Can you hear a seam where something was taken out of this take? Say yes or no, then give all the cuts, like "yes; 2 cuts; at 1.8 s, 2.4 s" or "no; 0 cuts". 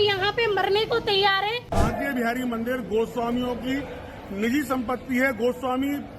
yes; 1 cut; at 1.7 s